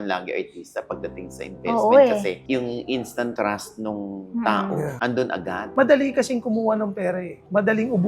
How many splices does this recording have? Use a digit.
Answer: 1